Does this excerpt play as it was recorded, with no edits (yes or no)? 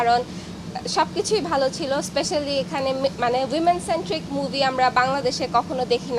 yes